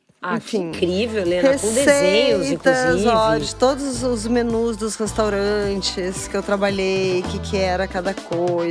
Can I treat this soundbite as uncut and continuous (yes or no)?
yes